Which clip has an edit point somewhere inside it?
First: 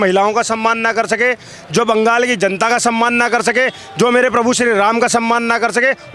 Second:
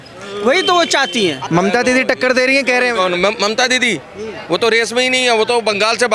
second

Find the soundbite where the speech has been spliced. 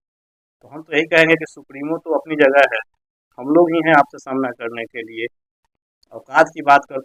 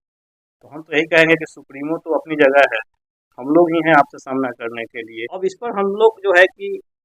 second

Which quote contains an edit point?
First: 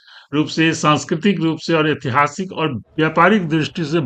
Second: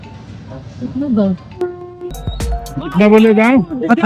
second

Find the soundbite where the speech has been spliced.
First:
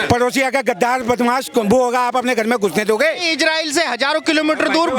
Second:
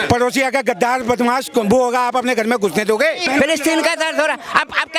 second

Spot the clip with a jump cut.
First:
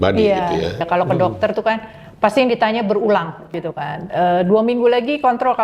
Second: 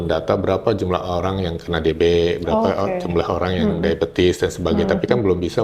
first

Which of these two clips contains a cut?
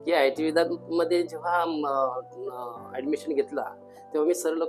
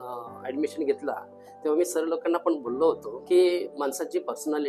second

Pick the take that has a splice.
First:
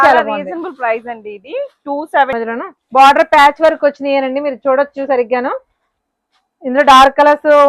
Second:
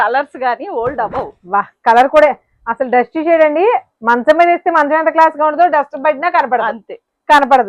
first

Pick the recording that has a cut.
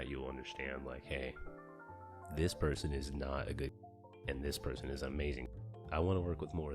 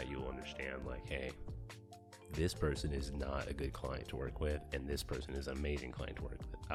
first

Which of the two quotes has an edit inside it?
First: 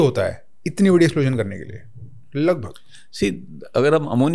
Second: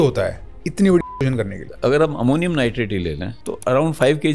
second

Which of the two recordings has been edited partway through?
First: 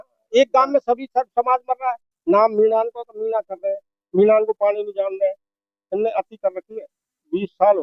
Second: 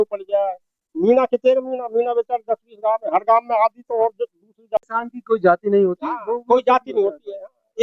second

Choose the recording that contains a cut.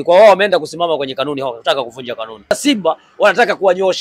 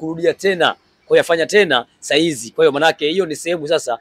first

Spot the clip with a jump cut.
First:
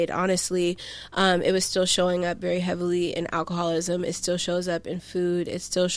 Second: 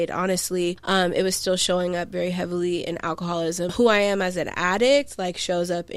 second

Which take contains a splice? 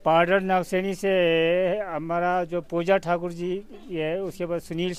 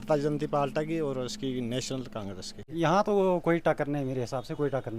second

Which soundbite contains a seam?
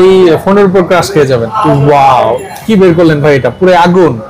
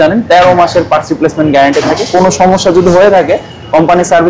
first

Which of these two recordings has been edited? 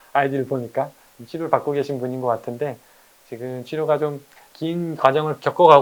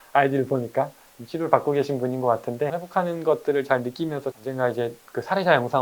second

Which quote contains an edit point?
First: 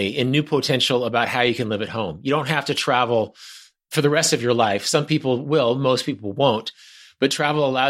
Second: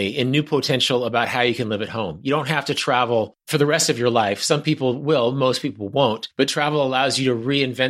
second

